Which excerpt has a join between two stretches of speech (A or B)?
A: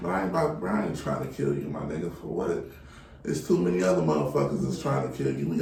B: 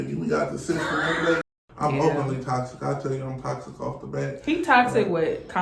B